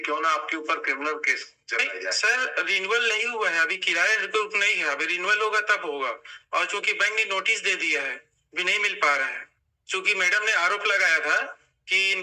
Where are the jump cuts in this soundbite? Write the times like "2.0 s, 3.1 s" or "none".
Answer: none